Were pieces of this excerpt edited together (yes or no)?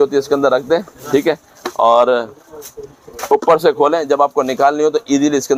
no